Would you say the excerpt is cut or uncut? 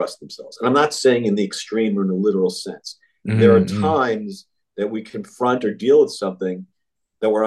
uncut